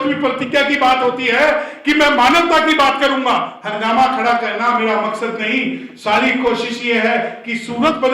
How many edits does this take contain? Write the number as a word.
one